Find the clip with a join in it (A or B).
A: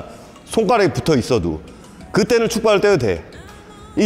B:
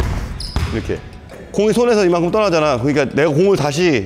B